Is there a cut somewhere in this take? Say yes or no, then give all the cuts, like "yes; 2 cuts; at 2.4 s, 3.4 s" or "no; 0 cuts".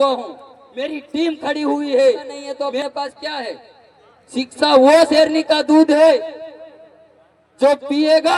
yes; 1 cut; at 2.8 s